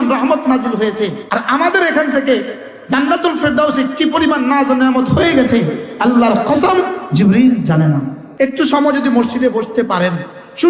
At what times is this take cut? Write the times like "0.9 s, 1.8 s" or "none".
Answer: 1.2 s, 8.2 s